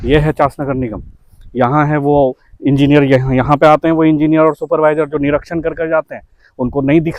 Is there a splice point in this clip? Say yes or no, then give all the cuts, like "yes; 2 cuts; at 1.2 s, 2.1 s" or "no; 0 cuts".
no; 0 cuts